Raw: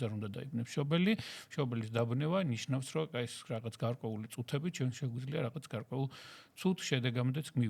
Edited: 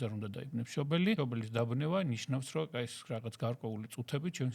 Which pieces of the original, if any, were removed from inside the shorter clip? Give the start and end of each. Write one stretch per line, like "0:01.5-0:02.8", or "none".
0:01.2-0:01.6